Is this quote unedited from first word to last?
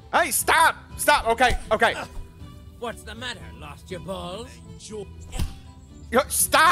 yes; 0 cuts

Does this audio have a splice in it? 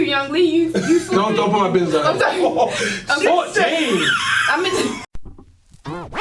yes; 1 cut; at 5.1 s

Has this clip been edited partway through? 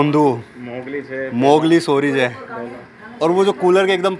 no; 0 cuts

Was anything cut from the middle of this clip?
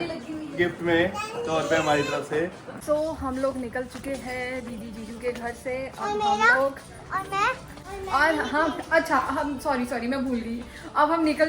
yes; 2 cuts; at 2.7 s, 7.7 s

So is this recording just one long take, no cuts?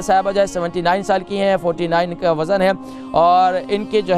yes; 0 cuts

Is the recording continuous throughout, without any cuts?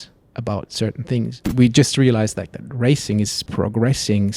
no; 2 cuts; at 1.4 s, 3.4 s

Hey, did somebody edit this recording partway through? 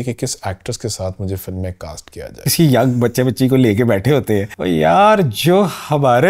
yes; 2 cuts; at 2.5 s, 4.5 s

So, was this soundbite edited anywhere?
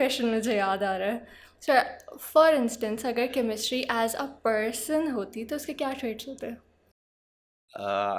no; 0 cuts

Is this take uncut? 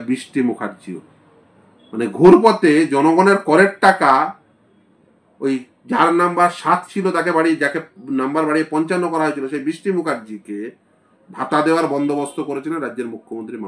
yes; 0 cuts

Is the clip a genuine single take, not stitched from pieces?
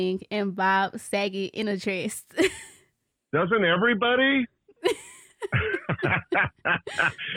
yes; 0 cuts

